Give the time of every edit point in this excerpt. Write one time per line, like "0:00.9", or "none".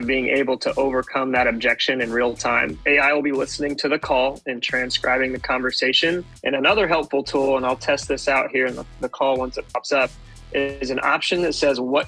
0:02.8